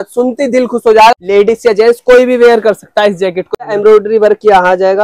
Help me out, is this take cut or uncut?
cut